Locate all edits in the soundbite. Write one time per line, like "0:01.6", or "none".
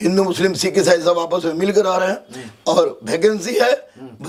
none